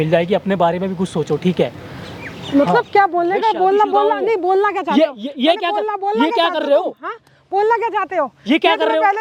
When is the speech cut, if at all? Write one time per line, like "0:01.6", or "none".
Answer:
none